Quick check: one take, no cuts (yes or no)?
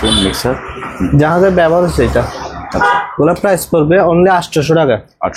yes